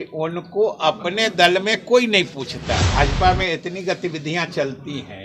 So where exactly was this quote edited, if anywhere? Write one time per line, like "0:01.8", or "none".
0:02.8